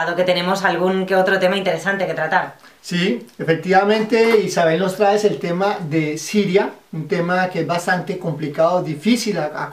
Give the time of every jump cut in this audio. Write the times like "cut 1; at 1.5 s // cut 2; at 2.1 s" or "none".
cut 1; at 7.1 s